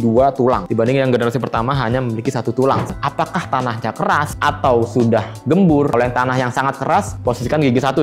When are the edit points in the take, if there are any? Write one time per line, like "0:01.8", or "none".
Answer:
0:02.9